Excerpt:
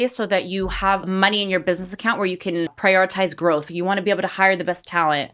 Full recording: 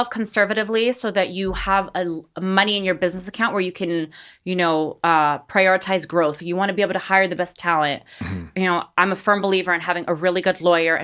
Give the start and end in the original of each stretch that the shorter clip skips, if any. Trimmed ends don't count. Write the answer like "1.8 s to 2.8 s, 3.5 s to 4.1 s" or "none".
1.9 s to 2.4 s, 4.1 s to 5.5 s